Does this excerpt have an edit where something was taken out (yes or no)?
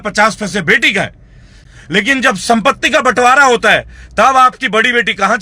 yes